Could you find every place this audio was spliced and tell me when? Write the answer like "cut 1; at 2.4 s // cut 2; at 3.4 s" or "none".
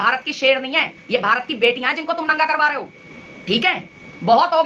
none